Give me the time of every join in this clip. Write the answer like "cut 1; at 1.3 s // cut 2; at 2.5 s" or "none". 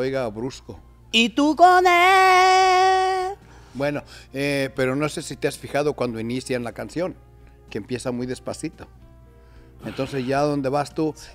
cut 1; at 1.0 s